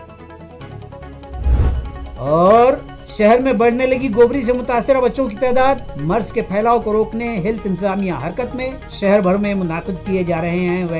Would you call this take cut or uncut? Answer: uncut